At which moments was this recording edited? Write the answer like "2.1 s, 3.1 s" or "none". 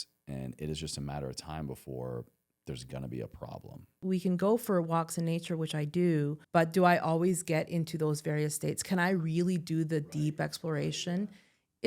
3.9 s, 6.4 s